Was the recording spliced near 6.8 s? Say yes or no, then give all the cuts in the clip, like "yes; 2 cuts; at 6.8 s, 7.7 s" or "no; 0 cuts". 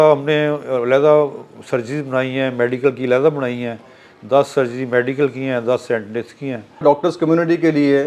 yes; 1 cut; at 6.8 s